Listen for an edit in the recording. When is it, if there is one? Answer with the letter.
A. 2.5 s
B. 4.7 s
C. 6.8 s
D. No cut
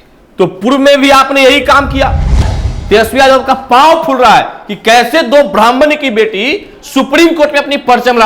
A